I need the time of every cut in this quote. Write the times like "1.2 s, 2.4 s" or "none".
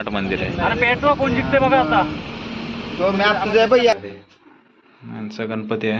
4.0 s